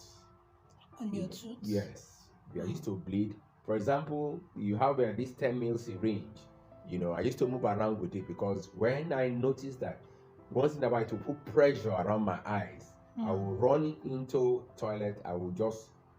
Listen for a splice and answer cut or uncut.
uncut